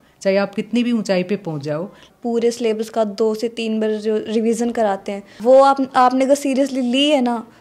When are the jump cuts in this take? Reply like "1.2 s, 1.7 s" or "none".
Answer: 2.1 s, 5.3 s